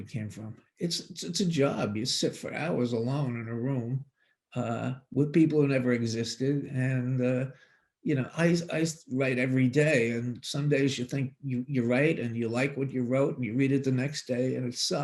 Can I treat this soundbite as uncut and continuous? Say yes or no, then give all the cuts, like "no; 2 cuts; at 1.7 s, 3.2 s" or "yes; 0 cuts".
yes; 0 cuts